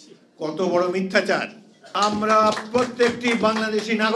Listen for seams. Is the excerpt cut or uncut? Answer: cut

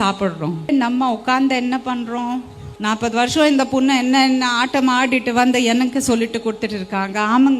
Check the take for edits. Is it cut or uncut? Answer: cut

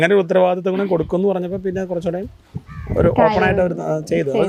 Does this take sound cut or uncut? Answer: uncut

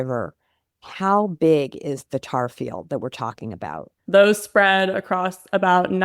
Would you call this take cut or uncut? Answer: cut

